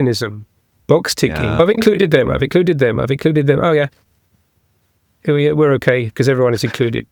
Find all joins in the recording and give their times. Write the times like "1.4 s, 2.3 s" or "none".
none

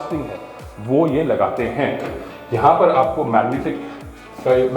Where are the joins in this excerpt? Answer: none

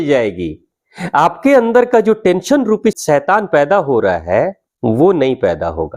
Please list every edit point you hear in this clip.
3.0 s, 4.7 s

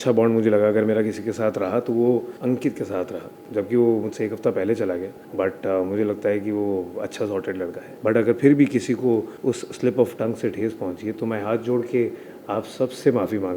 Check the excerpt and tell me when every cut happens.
7.9 s, 9.3 s

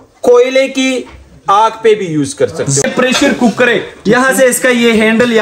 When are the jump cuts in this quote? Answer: 2.8 s

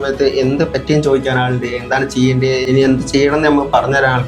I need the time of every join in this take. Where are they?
2.6 s

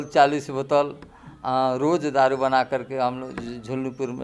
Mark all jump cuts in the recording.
none

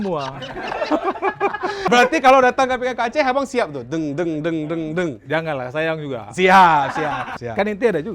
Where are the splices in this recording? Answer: 1.7 s, 7.2 s

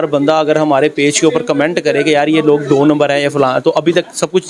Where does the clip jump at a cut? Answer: none

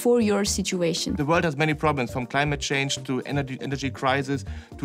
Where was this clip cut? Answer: 1.1 s

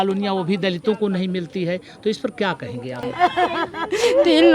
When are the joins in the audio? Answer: 3.1 s

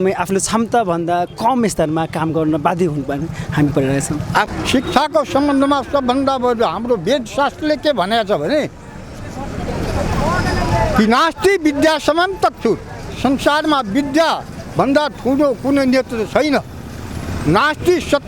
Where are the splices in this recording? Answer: 4.5 s

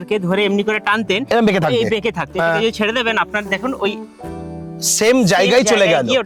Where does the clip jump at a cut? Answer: none

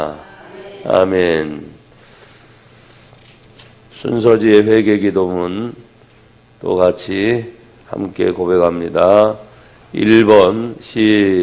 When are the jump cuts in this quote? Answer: none

